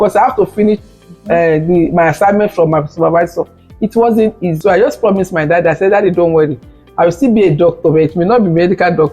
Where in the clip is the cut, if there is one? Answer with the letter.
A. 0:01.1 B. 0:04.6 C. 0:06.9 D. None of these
B